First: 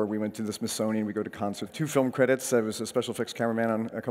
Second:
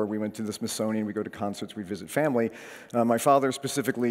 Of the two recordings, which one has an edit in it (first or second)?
second